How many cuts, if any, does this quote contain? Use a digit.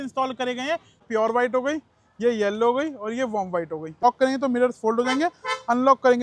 2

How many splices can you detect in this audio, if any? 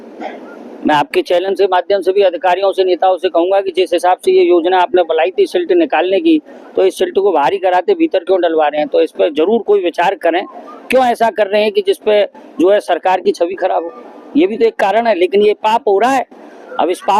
0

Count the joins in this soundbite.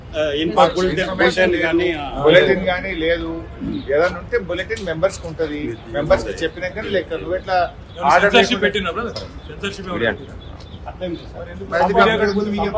0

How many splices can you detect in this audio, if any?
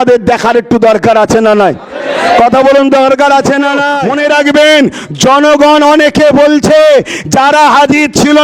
1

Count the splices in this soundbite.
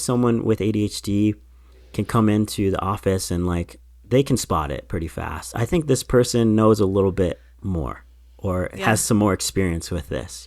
1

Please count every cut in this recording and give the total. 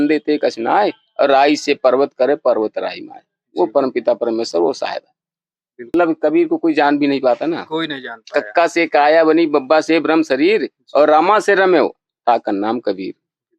1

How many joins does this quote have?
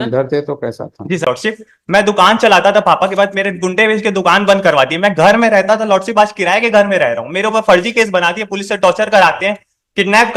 1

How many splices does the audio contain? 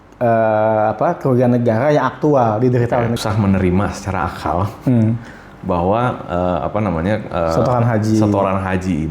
1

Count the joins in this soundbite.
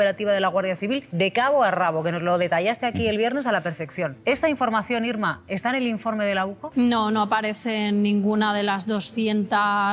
3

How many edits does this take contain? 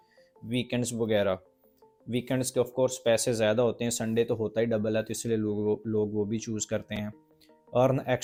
0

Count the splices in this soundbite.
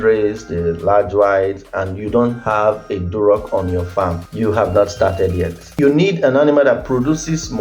2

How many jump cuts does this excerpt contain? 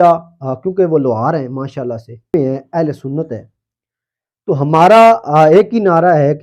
1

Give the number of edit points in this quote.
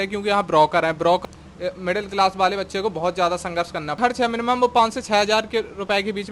2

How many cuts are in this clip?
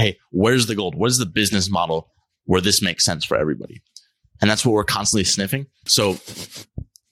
1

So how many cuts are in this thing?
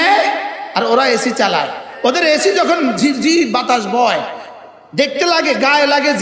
0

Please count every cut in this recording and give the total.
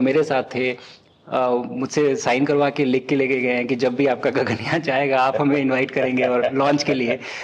0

